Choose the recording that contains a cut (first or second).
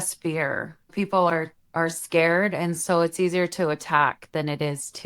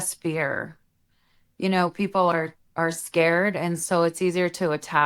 first